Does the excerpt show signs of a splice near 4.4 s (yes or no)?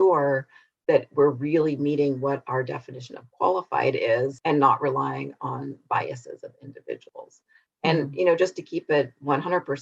yes